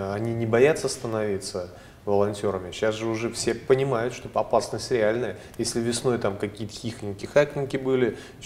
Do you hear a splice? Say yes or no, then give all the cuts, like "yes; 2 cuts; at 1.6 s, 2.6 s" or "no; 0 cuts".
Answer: no; 0 cuts